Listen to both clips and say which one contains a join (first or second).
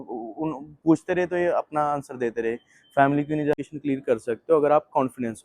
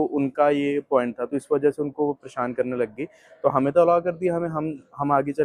first